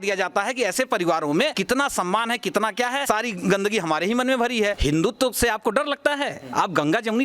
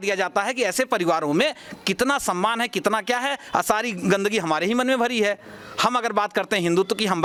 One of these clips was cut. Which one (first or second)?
first